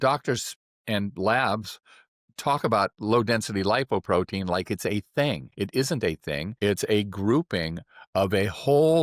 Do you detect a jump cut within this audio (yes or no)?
yes